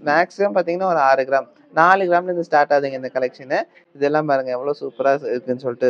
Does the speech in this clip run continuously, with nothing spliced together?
yes; 0 cuts

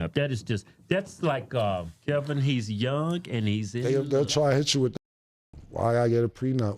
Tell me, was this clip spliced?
yes; 1 cut; at 3.7 s

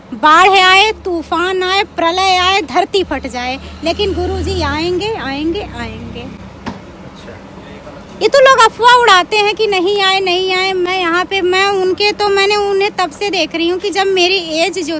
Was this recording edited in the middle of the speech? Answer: no; 0 cuts

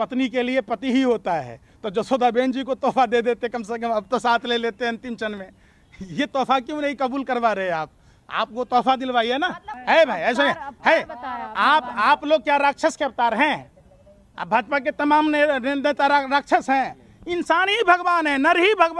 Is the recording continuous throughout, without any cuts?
yes; 0 cuts

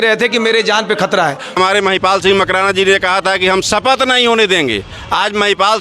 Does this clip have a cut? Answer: yes; 1 cut; at 1.5 s

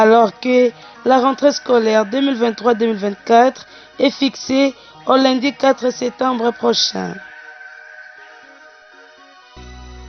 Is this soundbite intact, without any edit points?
no; 2 cuts; at 7.2 s, 9.1 s

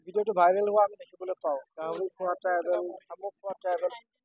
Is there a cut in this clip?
no; 0 cuts

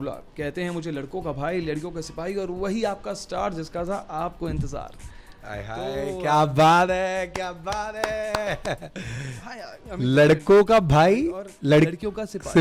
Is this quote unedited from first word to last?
yes; 0 cuts

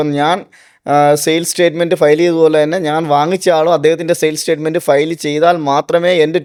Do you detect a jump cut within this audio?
no; 0 cuts

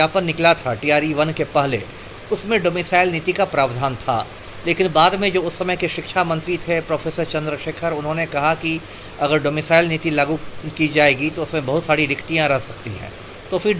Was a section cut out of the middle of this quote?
no; 0 cuts

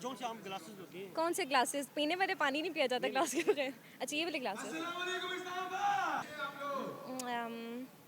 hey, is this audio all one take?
no; 1 cut; at 6.2 s

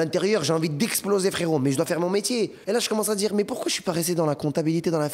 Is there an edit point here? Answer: yes; 1 cut; at 2.6 s

